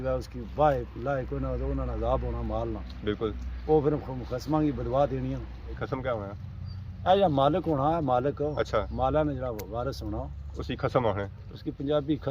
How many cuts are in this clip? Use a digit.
1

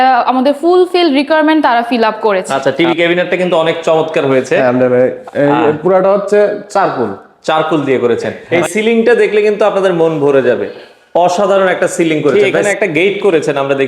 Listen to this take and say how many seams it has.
3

